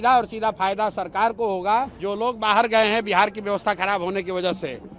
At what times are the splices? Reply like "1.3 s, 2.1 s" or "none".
2.0 s